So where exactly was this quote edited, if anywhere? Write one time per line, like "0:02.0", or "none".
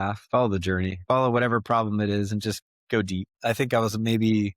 0:01.0
0:03.3